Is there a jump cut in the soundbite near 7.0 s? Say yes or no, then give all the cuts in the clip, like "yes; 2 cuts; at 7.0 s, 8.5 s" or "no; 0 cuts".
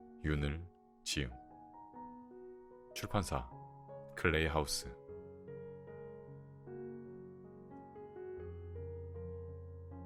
no; 1 cut; at 4.7 s